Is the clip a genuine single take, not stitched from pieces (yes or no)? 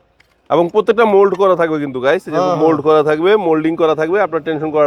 yes